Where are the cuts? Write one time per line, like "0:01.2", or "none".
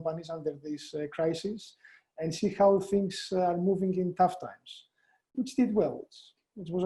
none